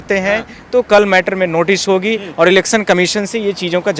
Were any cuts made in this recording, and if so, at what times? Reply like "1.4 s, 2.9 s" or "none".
none